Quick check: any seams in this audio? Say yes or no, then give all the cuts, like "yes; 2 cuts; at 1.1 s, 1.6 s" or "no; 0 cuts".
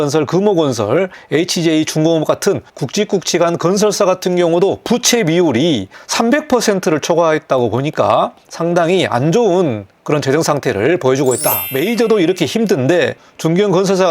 yes; 5 cuts; at 1.2 s, 2.7 s, 6.0 s, 8.4 s, 11.7 s